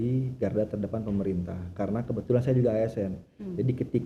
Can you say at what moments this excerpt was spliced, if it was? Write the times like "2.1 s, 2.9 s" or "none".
none